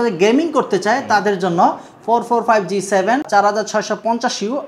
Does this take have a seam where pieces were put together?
yes; 1 cut; at 3.3 s

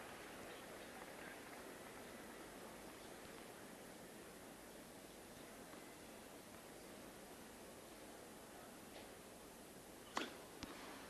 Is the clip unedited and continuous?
no; 1 cut; at 1.9 s

